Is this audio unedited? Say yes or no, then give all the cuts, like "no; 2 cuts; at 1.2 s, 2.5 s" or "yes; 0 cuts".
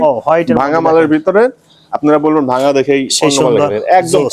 yes; 0 cuts